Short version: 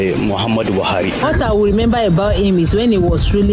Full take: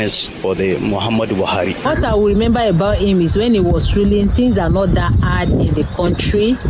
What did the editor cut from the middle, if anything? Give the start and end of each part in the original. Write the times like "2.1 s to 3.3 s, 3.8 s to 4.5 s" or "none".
none